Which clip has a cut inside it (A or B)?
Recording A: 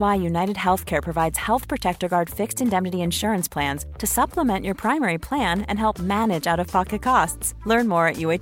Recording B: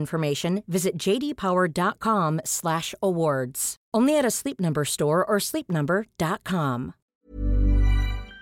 B